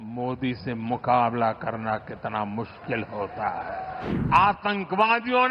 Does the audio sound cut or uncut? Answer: cut